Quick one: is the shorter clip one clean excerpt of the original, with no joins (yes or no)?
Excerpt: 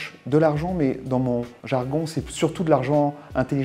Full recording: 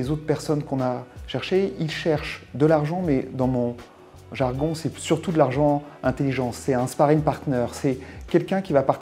no